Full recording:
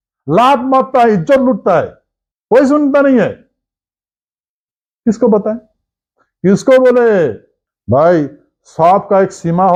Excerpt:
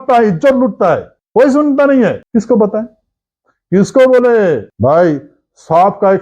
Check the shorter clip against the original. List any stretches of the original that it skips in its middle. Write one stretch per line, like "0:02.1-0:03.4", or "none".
0:02.0-0:02.3
0:03.4-0:04.9
0:07.4-0:07.8